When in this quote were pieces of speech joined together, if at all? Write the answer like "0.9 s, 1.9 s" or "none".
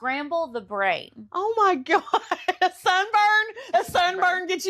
none

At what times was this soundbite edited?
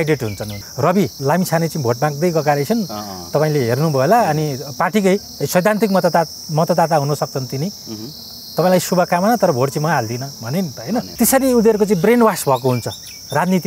1.0 s, 11.1 s

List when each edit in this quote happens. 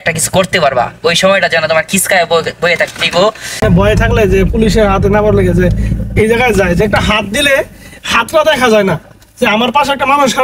3.6 s

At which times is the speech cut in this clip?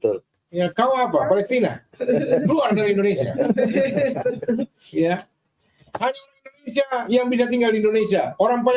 none

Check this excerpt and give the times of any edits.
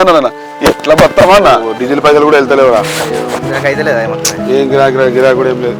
1.7 s

